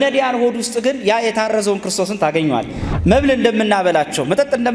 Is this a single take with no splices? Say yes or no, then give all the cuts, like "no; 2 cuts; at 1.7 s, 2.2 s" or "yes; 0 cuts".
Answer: no; 1 cut; at 2.8 s